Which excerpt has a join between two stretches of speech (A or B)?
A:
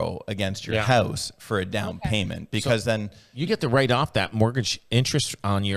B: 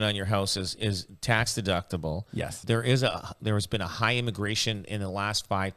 B